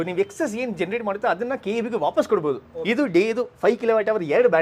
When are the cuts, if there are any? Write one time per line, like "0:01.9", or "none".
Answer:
0:02.7

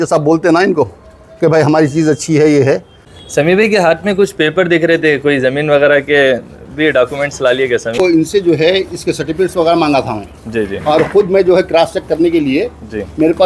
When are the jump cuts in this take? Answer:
0:03.1
0:07.9

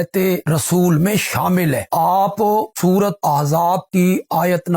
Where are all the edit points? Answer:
none

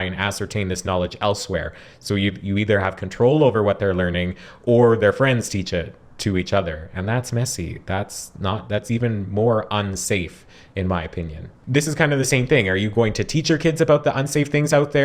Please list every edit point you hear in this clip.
0:11.5

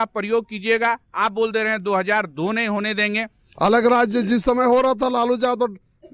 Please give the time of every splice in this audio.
0:03.4

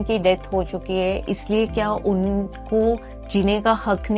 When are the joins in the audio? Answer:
none

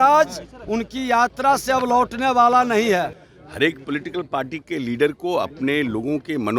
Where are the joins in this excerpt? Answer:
0:03.1

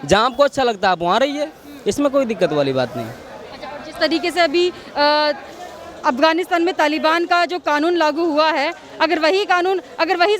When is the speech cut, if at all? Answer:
none

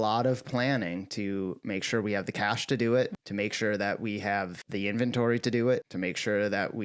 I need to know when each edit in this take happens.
0:03.2
0:04.6
0:05.9

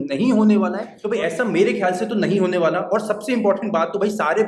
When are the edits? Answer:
0:00.9

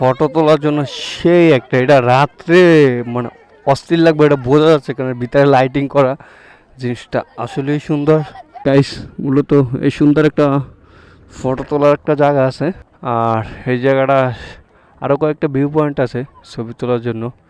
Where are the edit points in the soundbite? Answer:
0:08.4
0:12.9

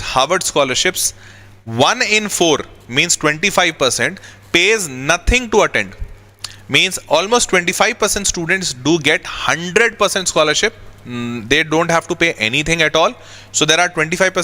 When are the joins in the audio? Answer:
none

